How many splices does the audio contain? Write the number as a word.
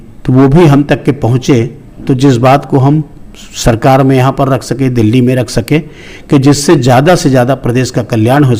zero